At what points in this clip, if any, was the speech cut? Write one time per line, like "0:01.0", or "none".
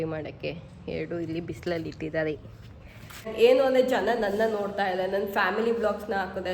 0:03.3